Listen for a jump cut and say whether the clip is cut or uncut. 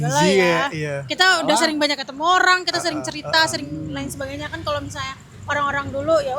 uncut